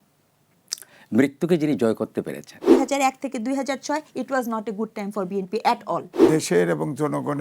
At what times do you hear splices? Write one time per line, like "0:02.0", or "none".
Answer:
0:02.6
0:06.2